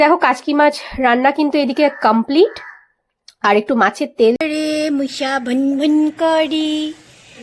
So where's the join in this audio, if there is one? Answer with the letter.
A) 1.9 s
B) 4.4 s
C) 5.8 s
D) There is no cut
B